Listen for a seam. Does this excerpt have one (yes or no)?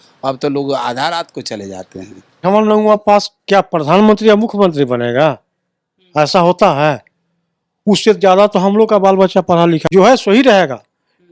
yes